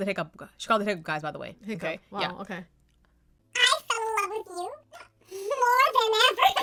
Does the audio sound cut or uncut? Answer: uncut